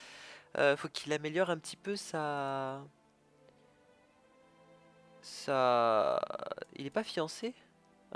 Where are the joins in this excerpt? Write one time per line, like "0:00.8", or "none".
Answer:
0:01.7